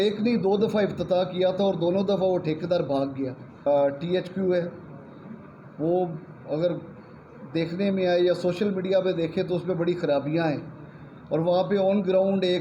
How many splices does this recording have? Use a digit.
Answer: 1